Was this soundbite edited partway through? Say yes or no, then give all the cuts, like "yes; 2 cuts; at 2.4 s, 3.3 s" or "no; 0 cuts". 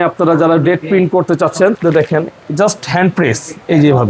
yes; 1 cut; at 1.8 s